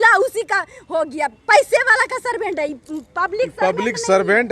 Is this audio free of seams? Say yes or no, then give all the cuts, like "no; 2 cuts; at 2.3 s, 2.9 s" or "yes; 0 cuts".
yes; 0 cuts